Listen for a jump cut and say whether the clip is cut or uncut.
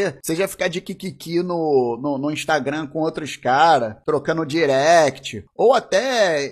cut